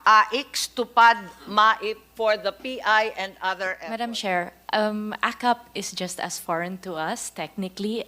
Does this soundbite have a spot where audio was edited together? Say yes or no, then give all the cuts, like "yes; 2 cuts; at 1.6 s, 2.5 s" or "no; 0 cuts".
yes; 1 cut; at 3.8 s